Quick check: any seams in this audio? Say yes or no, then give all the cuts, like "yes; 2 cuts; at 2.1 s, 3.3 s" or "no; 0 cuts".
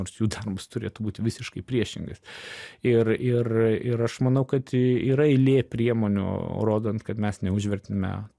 no; 0 cuts